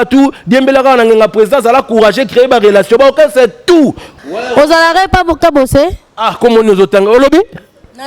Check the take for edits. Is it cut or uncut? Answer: cut